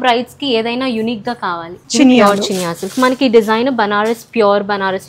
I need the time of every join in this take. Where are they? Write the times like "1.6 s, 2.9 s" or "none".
1.7 s